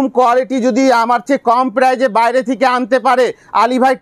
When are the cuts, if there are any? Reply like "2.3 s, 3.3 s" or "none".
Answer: none

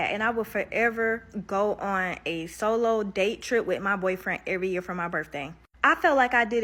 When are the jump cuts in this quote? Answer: none

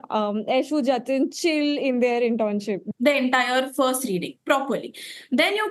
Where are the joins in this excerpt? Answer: 2.8 s

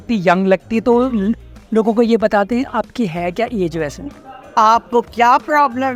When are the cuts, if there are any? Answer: none

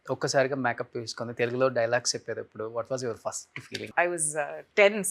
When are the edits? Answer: 3.9 s

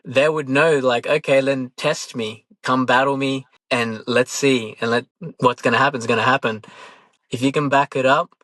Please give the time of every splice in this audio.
3.5 s, 5.1 s, 7.0 s

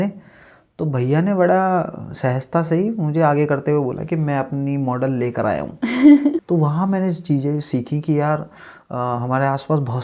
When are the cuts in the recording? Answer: 6.4 s

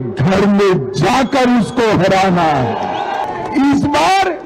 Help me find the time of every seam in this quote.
3.2 s

